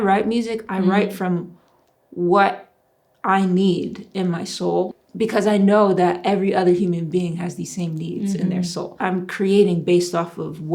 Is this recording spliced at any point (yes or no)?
yes